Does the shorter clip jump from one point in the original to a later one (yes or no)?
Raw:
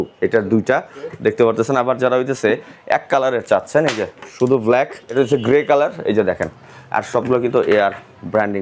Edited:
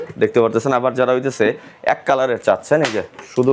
no